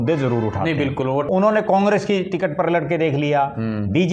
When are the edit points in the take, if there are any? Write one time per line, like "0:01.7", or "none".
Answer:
0:01.3